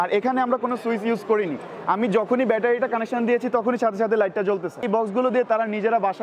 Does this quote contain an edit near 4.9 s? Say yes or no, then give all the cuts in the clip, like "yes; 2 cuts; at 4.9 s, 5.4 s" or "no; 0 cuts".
yes; 1 cut; at 4.9 s